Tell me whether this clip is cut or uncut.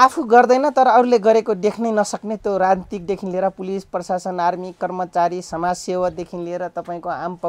uncut